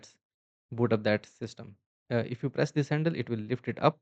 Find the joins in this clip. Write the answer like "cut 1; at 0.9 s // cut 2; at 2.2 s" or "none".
cut 1; at 1.9 s